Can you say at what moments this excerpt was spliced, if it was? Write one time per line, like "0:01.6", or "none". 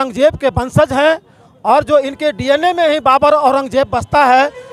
none